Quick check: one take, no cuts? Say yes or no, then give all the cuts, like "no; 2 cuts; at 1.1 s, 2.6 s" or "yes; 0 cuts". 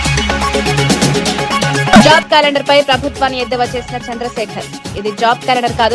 no; 1 cut; at 1.9 s